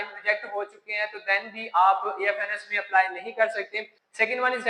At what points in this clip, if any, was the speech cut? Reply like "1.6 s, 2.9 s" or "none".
none